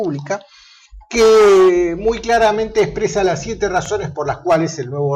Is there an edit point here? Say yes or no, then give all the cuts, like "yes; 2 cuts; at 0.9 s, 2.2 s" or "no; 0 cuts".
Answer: yes; 1 cut; at 3.5 s